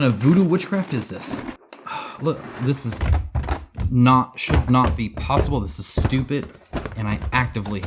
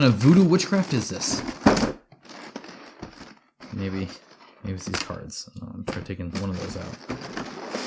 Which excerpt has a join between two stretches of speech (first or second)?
first